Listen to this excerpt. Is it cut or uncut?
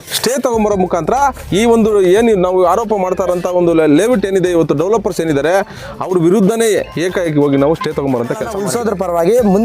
cut